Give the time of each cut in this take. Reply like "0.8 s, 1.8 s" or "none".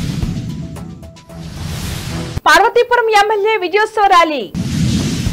2.4 s